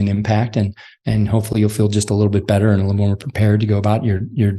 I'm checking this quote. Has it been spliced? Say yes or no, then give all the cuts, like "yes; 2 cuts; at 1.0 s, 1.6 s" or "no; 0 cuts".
no; 0 cuts